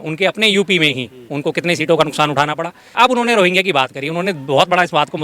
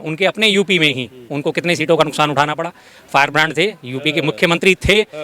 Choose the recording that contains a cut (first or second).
first